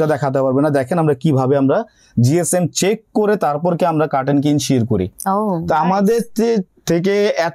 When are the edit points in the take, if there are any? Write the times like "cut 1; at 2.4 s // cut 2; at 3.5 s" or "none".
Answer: none